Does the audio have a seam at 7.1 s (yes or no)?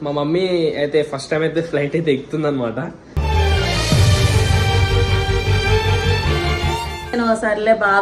yes